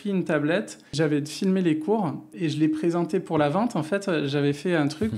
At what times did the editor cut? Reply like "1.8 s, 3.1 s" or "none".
0.9 s, 2.3 s